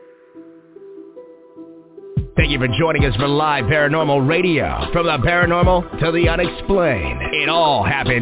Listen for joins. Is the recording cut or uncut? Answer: cut